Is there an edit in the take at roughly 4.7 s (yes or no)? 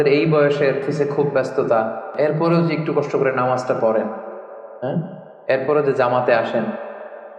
no